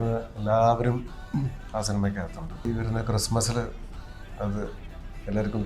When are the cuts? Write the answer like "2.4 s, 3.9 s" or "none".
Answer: 2.6 s

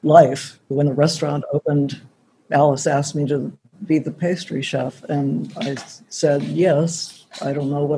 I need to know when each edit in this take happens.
none

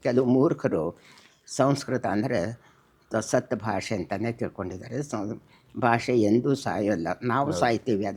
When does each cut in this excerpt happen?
none

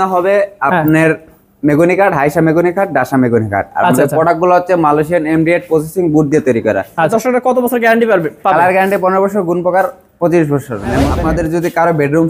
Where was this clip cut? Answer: 7.1 s, 11.0 s

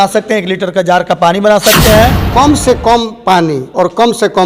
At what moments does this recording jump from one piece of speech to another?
2.2 s

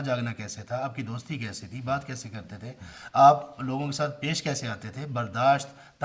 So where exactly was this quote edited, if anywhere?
none

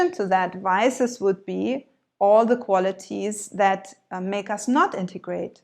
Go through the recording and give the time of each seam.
none

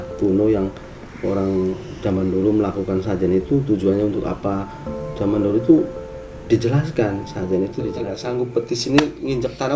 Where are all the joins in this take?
8.0 s

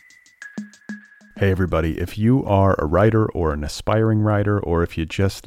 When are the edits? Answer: 0.9 s

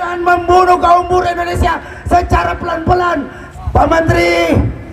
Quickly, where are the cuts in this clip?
3.4 s

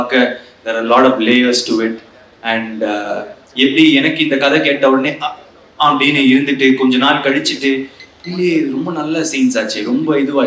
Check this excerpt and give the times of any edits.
none

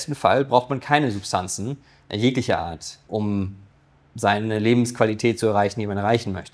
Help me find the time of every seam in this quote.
none

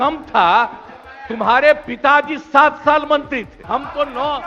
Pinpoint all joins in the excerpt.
3.5 s

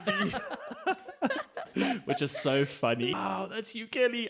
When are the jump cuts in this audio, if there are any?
3.1 s

